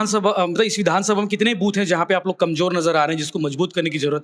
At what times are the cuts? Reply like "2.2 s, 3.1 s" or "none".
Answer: none